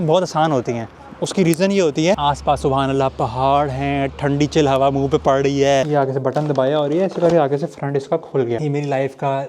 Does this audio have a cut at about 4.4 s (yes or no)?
no